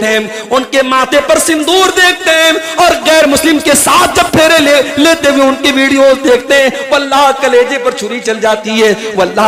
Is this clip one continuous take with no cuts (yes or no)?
yes